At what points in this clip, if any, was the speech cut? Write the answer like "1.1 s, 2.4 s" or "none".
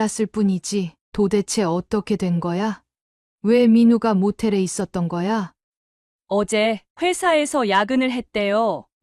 1.0 s, 5.6 s